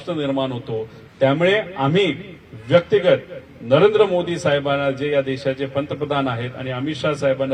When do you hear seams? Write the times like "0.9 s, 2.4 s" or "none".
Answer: none